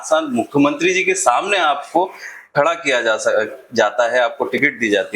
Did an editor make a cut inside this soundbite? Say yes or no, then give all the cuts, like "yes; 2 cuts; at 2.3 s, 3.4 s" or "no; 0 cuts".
no; 0 cuts